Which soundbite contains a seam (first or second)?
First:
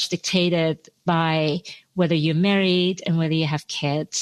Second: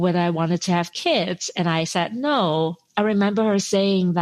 second